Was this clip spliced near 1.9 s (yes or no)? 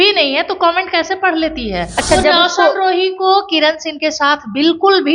yes